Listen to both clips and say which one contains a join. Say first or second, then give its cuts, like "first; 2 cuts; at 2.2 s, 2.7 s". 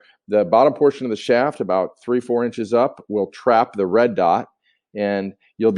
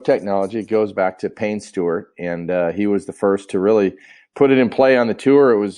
second; 1 cut; at 0.9 s